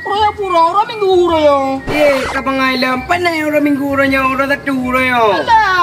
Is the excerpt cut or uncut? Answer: uncut